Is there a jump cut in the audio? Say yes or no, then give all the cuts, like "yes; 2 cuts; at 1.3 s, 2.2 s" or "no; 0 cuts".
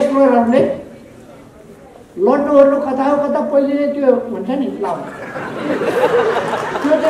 no; 0 cuts